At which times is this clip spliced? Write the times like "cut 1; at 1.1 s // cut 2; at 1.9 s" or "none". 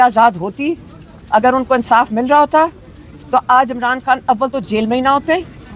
none